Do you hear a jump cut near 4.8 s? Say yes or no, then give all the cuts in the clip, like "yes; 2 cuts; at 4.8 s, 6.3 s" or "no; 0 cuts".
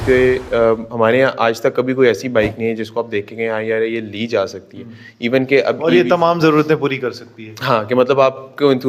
no; 0 cuts